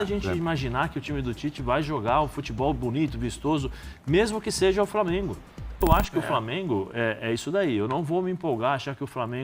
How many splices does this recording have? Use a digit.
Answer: 1